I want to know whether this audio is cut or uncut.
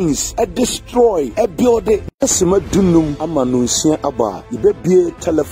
cut